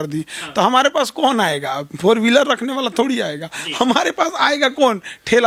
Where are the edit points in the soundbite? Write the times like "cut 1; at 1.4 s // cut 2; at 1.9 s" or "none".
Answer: none